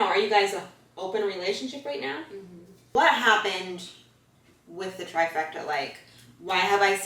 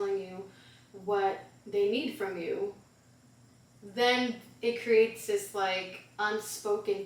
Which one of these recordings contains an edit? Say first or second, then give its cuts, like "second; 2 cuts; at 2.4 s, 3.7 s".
first; 1 cut; at 2.8 s